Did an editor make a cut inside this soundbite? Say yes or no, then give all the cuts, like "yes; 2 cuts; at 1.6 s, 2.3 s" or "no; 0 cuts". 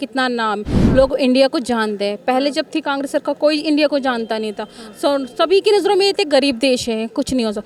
no; 0 cuts